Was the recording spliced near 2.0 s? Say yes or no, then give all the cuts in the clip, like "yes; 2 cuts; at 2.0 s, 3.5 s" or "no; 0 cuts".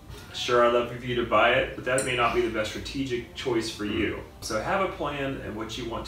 no; 1 cut; at 4.4 s